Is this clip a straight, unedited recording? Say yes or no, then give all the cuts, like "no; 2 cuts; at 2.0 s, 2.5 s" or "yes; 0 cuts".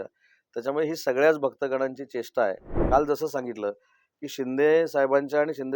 no; 1 cut; at 2.7 s